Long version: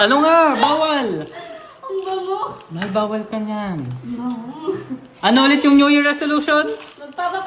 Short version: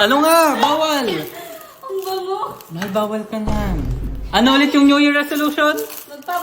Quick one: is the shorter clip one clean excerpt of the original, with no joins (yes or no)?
no